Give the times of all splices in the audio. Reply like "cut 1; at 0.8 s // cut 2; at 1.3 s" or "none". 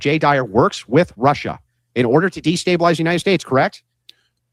none